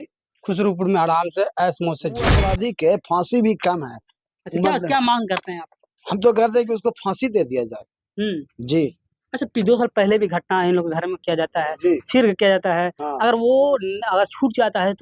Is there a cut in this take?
yes; 1 cut; at 2.4 s

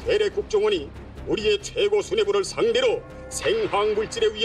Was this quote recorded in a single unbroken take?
yes; 0 cuts

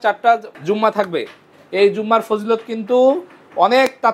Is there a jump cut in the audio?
no; 0 cuts

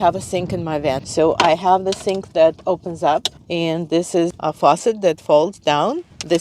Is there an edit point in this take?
yes; 1 cut; at 1.0 s

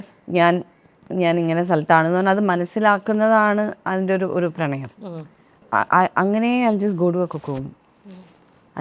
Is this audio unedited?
no; 1 cut; at 5.6 s

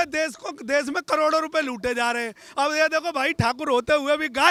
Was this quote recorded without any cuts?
yes; 0 cuts

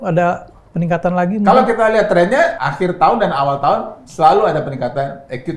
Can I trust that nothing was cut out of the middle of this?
no; 1 cut; at 2.6 s

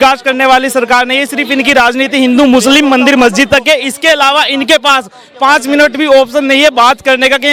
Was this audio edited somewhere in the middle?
no; 0 cuts

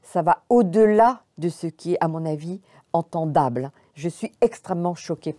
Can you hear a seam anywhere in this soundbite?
no; 0 cuts

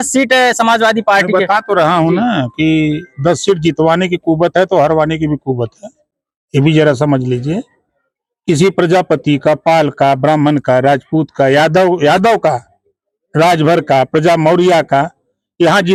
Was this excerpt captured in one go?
yes; 0 cuts

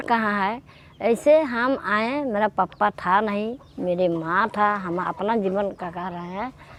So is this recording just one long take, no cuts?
yes; 0 cuts

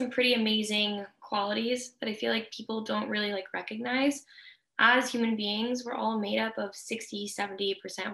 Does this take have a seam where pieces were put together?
no; 0 cuts

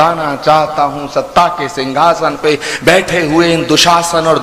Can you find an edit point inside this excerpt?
no; 0 cuts

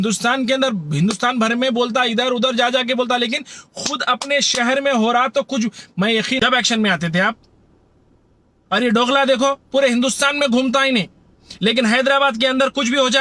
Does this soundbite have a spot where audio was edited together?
yes; 1 cut; at 6.4 s

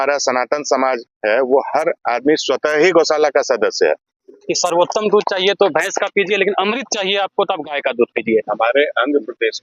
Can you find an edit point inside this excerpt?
yes; 1 cut; at 4.4 s

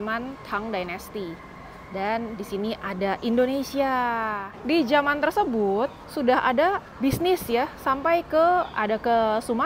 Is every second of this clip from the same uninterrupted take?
no; 3 cuts; at 4.5 s, 6.0 s, 6.9 s

